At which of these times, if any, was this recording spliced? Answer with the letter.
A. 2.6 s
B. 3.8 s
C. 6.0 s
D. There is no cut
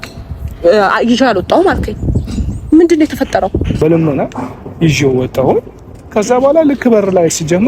B